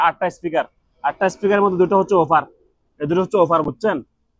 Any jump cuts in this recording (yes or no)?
no